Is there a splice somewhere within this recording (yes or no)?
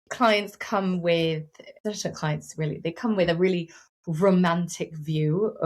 yes